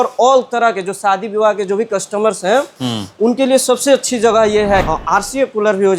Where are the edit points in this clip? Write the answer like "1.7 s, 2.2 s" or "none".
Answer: 4.9 s